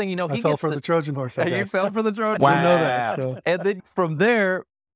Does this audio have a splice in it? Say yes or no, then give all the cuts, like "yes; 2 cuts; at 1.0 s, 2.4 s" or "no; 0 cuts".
yes; 1 cut; at 3.8 s